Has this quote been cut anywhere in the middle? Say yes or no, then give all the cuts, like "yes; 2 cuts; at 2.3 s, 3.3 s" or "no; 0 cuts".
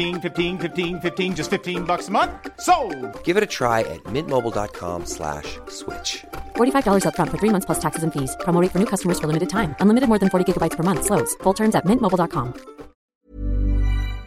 yes; 1 cut; at 13.1 s